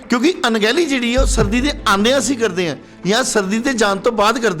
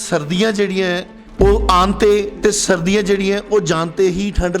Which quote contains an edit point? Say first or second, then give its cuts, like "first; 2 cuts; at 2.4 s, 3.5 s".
second; 1 cut; at 1.2 s